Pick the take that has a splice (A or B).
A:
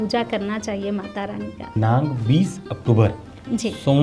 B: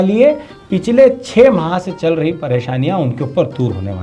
A